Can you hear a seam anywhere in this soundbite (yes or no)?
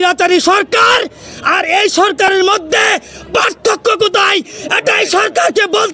no